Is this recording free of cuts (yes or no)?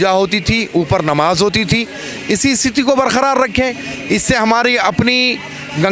yes